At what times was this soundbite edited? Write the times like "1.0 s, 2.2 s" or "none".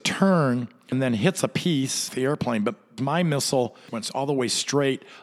0.9 s, 2.1 s, 3.0 s, 3.9 s